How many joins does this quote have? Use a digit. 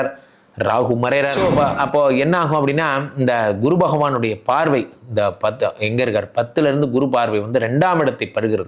1